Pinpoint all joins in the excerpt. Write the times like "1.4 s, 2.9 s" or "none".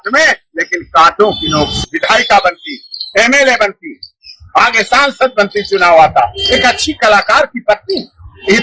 1.7 s